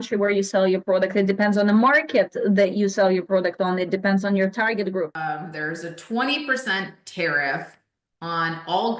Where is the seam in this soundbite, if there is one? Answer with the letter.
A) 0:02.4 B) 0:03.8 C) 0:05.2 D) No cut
C